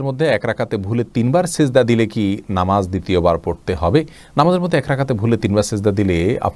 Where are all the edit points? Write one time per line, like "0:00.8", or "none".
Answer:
none